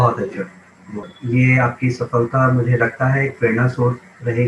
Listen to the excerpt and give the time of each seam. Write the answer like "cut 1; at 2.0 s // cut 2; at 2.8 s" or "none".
cut 1; at 1.1 s

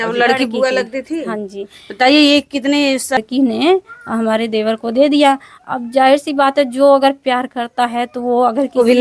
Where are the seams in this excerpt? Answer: cut 1; at 3.2 s

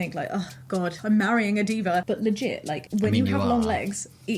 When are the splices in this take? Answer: cut 1; at 1.0 s

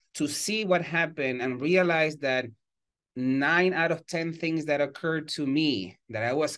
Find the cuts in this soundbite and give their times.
none

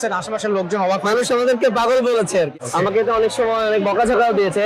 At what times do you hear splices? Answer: cut 1; at 2.5 s

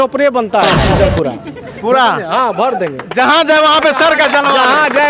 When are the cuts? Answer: cut 1; at 0.9 s

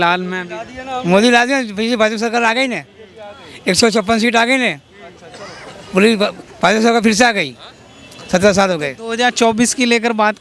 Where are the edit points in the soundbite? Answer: none

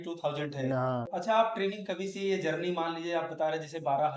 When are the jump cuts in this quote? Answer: cut 1; at 1.1 s

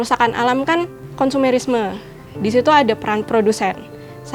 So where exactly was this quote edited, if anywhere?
cut 1; at 1.0 s // cut 2; at 3.2 s

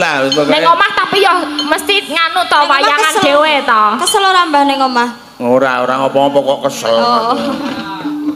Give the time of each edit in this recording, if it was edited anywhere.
none

